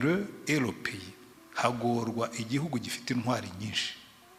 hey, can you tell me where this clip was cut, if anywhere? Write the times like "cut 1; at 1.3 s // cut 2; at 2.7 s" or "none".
none